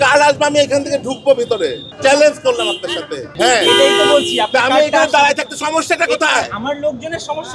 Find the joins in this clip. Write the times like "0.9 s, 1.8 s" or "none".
1.9 s, 3.3 s